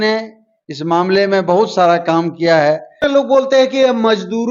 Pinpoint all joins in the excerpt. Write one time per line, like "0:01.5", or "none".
0:03.0